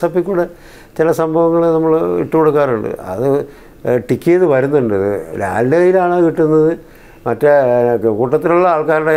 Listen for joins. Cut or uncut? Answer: uncut